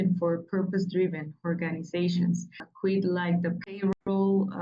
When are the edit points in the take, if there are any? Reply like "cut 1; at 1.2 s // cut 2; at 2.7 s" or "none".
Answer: cut 1; at 2.7 s